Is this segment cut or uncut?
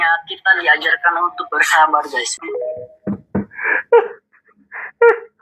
cut